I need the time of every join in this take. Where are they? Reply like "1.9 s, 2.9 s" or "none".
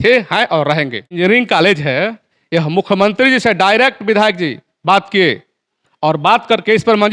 1.1 s